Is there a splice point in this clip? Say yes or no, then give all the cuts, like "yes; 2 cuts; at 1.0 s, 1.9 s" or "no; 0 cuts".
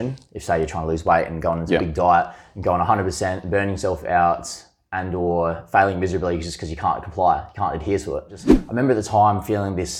yes; 1 cut; at 8.6 s